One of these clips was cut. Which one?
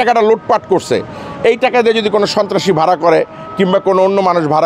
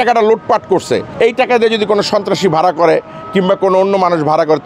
second; 1 cut; at 1.1 s

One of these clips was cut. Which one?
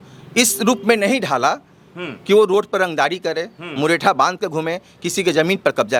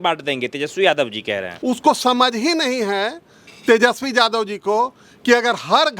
second; 1 cut; at 1.5 s

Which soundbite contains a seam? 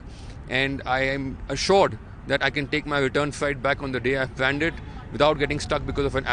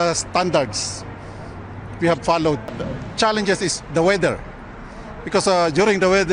second; 1 cut; at 2.8 s

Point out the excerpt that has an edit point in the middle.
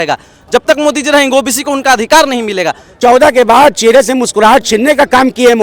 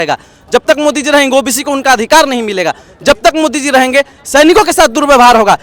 first; 1 cut; at 3.0 s

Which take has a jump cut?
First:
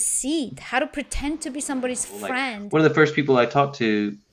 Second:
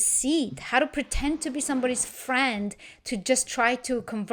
first; 1 cut; at 2.5 s

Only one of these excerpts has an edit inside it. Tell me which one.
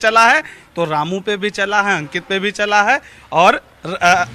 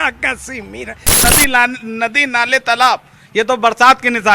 second; 1 cut; at 1.2 s

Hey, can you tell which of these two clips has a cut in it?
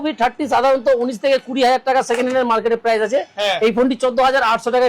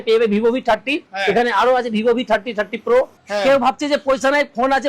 second; 2 cuts; at 1.1 s, 3.2 s

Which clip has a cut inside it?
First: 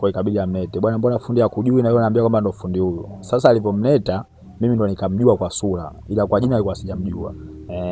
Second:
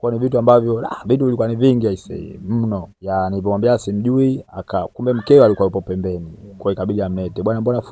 second; 1 cut; at 2.9 s

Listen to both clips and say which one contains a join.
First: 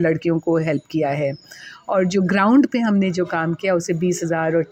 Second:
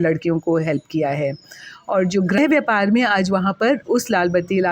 second; 1 cut; at 2.4 s

